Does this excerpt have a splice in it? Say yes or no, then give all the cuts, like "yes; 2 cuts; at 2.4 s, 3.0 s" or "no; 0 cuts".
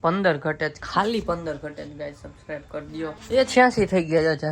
yes; 1 cut; at 3.2 s